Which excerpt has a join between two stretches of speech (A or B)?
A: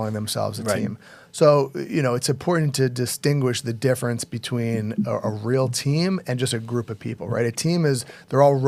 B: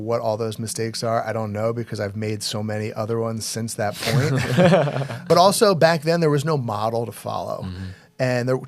B